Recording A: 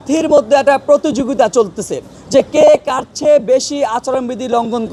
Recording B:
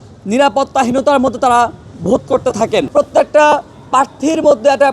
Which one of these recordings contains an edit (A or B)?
B